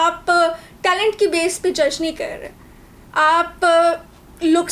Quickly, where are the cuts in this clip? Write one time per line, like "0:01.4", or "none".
none